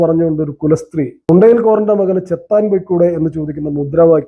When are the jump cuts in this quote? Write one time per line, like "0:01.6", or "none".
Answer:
0:01.3

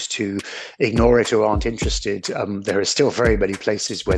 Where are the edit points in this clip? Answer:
none

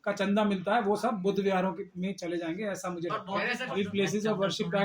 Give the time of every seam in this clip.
0:03.6

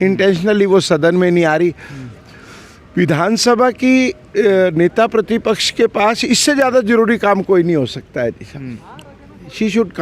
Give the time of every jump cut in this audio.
none

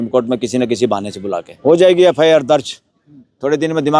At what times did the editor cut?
0:01.5

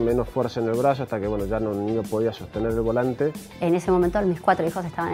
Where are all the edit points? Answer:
none

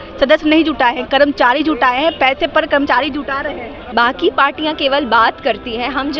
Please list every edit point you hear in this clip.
0:03.7

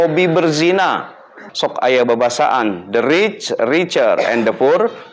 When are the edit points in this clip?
0:01.4

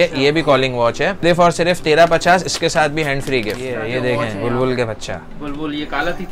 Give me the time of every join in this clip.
0:01.2
0:03.7

